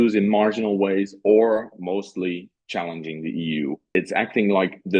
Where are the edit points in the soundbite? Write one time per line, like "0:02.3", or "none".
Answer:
0:03.8